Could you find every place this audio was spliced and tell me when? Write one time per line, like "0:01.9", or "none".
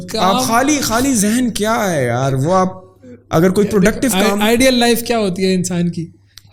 none